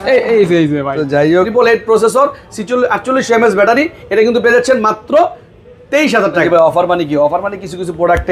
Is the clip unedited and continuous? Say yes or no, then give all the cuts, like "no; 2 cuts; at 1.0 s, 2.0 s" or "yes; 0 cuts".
no; 2 cuts; at 1.5 s, 6.4 s